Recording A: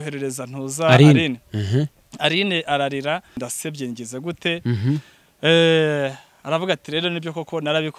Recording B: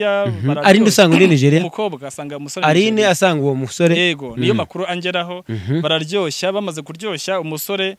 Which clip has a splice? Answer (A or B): A